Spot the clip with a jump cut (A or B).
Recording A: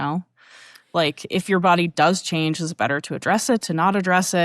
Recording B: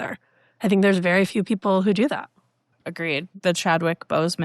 B